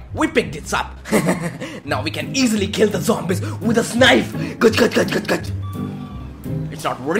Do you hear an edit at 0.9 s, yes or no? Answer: no